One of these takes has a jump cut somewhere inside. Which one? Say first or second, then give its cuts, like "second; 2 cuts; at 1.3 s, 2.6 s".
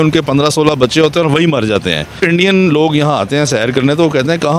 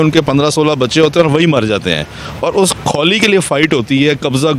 first; 1 cut; at 2.2 s